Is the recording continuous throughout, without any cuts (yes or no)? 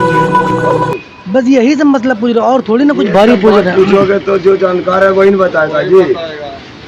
no